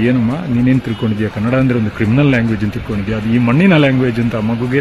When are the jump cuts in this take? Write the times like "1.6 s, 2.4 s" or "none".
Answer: none